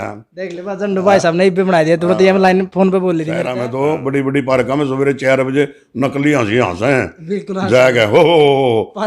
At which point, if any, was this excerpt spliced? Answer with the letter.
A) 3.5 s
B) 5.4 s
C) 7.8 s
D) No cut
A